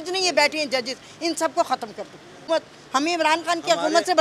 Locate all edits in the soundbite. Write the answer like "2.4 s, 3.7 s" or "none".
2.4 s